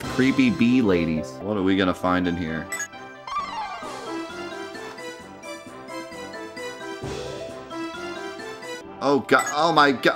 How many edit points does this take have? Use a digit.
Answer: 2